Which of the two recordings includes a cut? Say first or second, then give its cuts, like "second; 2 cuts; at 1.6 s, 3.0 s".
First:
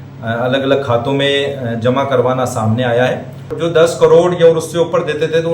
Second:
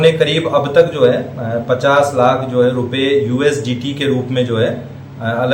first; 1 cut; at 3.6 s